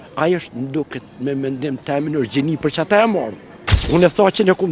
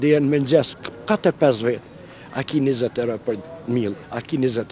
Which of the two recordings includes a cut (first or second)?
first